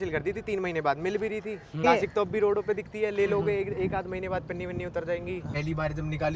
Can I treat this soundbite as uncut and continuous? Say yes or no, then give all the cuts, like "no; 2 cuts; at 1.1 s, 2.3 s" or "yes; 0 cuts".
no; 2 cuts; at 1.8 s, 5.5 s